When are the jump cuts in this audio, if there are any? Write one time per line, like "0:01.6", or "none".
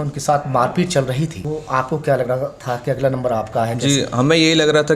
0:01.4